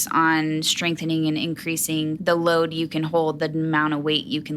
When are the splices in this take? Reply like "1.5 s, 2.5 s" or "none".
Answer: 2.2 s

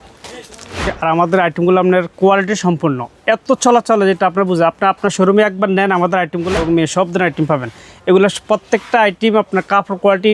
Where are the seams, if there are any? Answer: 1.0 s, 6.5 s

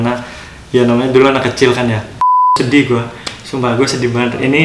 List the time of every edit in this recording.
2.6 s

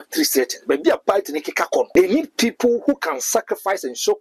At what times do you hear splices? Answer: 1.9 s

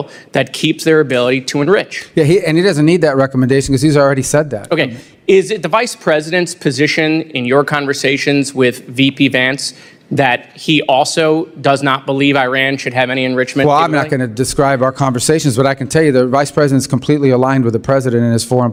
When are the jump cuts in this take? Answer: none

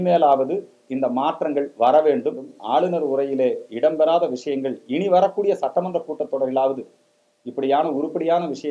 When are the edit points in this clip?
2.5 s

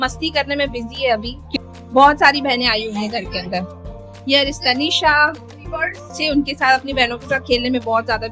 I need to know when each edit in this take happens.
1.6 s, 6.2 s

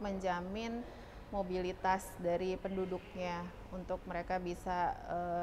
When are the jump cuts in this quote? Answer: none

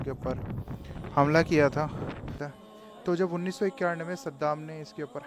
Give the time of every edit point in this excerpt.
2.5 s

